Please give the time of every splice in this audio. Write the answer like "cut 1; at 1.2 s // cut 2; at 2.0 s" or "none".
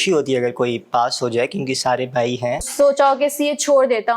cut 1; at 2.7 s